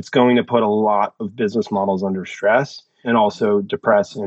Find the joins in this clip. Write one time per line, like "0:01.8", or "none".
0:03.0